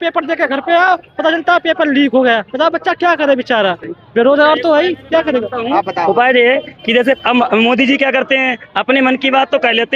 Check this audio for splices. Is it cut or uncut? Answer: uncut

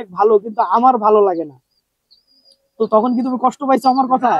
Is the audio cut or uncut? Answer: uncut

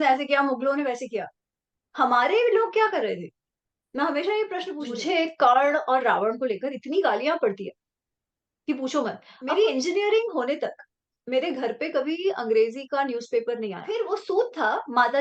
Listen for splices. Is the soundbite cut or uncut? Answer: cut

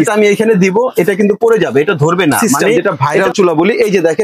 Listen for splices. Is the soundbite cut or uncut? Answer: cut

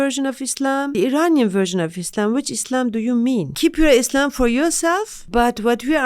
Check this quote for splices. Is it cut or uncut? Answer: cut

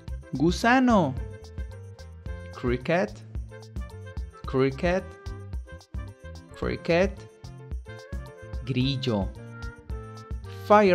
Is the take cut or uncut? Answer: uncut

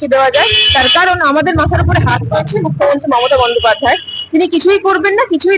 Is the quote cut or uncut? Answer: uncut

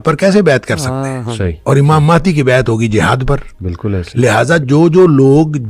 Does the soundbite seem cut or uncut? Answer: uncut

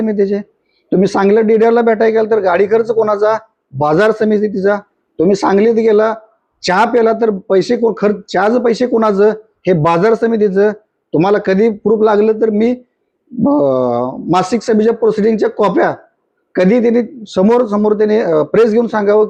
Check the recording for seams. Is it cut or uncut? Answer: uncut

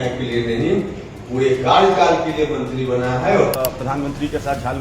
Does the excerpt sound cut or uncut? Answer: cut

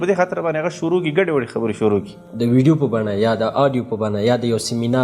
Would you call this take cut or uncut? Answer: cut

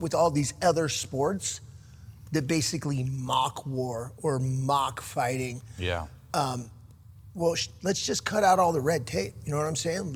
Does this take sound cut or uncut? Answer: uncut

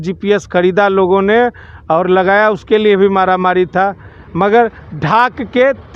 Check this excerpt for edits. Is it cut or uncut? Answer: uncut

